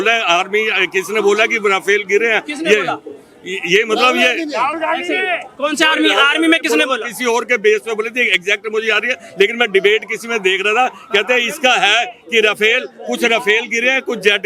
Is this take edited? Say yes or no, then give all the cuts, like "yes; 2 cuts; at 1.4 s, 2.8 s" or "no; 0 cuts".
no; 0 cuts